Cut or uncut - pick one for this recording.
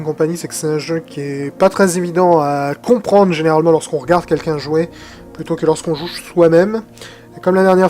uncut